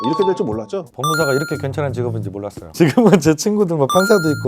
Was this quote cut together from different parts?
yes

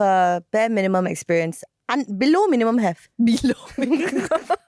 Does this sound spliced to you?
no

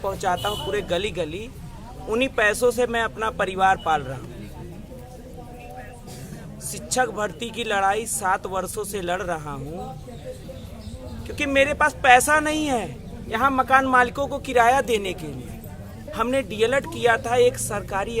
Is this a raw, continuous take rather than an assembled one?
no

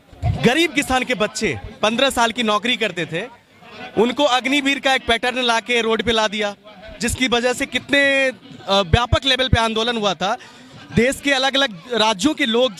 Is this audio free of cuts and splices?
yes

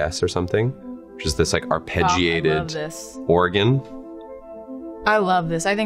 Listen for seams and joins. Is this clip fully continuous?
yes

